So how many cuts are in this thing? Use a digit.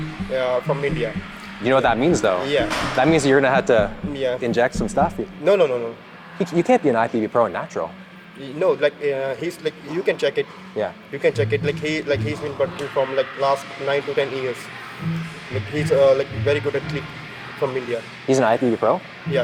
0